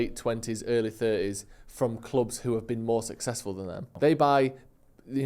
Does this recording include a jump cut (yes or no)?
yes